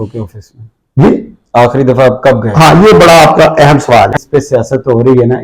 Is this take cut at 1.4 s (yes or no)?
no